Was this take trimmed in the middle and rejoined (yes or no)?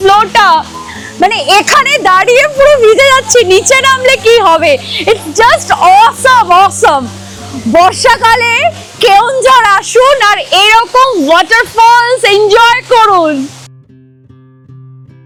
no